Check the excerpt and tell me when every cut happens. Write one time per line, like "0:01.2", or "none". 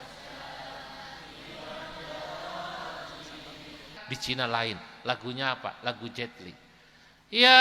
0:04.0